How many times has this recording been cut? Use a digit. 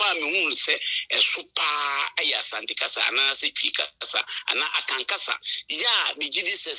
0